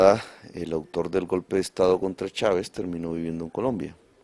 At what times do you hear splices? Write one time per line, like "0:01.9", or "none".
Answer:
none